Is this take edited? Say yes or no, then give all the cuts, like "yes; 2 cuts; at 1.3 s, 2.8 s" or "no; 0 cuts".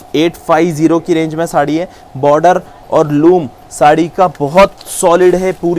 no; 0 cuts